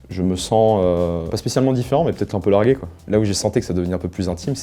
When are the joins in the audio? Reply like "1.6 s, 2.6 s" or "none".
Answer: 1.3 s, 2.9 s